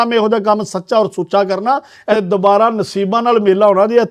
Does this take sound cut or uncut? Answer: cut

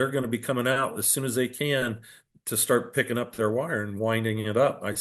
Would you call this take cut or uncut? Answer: uncut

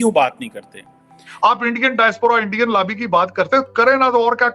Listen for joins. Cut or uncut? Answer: cut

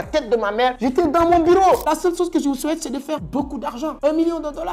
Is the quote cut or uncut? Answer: cut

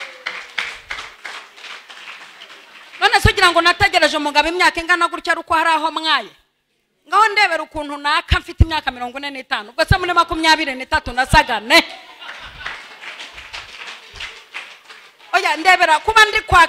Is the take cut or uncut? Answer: uncut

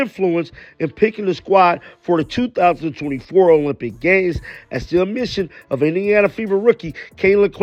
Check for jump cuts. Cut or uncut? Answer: uncut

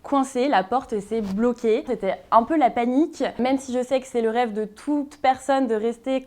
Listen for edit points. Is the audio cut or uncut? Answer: cut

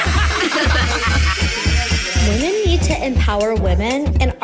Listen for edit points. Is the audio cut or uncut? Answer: uncut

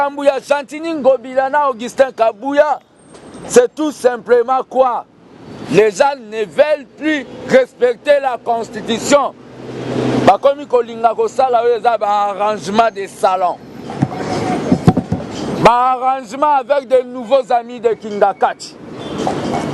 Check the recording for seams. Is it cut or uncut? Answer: uncut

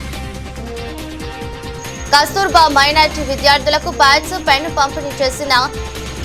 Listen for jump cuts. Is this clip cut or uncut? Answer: uncut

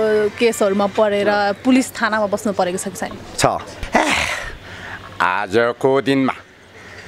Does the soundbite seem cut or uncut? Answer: cut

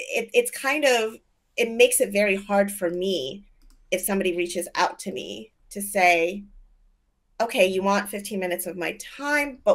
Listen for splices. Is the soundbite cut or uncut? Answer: uncut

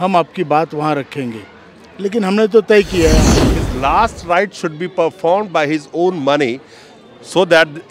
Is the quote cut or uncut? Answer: cut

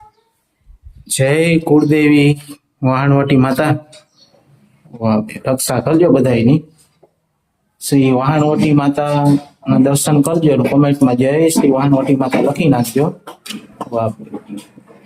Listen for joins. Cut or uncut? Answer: uncut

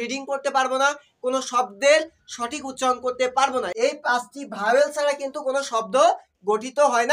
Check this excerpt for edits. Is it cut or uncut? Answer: cut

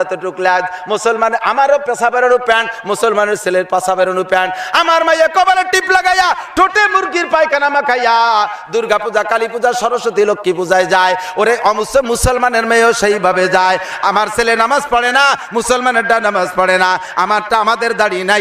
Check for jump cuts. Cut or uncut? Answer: uncut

